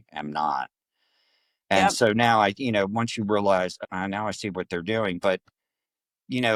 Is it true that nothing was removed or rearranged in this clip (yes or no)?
yes